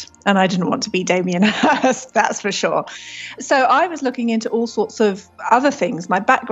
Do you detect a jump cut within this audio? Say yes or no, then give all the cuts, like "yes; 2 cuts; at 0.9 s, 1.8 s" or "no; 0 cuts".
yes; 1 cut; at 3.4 s